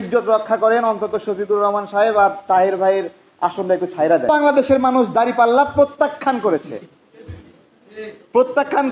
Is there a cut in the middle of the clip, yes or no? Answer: yes